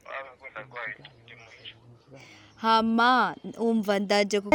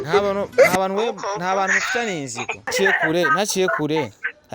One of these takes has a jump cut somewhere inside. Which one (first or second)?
second